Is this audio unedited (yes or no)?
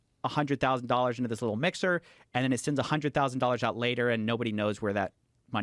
yes